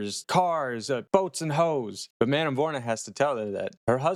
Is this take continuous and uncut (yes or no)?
yes